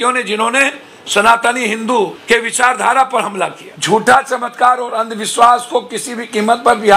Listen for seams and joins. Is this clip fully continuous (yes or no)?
no